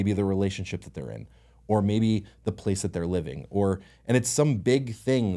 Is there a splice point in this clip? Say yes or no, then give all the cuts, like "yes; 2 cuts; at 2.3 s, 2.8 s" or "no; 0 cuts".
no; 0 cuts